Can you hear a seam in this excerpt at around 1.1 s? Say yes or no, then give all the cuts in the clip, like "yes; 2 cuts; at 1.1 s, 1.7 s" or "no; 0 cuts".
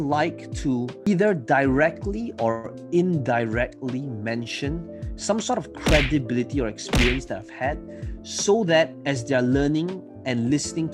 yes; 1 cut; at 1.1 s